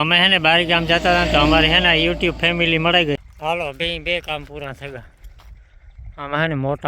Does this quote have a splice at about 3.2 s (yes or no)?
yes